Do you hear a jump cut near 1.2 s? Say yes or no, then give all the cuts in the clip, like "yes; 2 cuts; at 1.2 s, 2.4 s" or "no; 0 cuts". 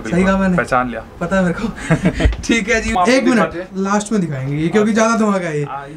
no; 1 cut; at 2.9 s